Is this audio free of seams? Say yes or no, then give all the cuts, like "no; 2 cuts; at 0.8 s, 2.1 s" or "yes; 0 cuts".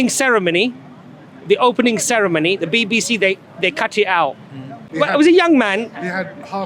no; 1 cut; at 4.9 s